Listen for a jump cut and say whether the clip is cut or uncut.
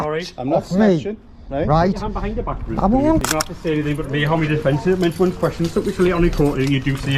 cut